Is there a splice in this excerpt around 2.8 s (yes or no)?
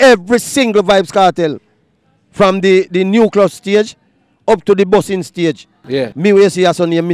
no